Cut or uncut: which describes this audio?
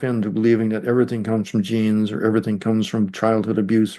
uncut